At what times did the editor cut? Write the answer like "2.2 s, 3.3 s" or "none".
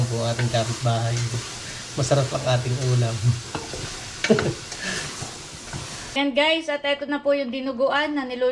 6.2 s